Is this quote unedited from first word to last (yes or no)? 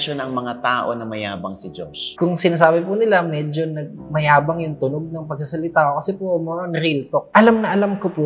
no